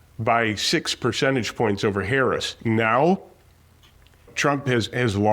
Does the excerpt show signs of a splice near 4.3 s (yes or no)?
yes